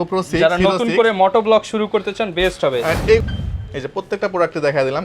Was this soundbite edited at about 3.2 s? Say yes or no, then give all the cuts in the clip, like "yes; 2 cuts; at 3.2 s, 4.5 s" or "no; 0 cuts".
yes; 1 cut; at 3.2 s